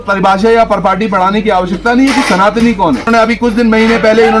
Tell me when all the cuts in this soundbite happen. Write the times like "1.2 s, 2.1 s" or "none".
3.1 s